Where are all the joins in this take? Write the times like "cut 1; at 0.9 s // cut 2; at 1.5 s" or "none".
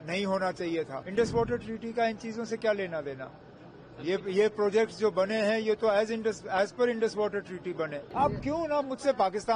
cut 1; at 1.0 s // cut 2; at 8.0 s